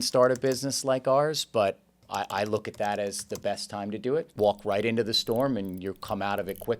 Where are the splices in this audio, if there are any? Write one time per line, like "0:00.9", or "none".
0:02.0
0:04.3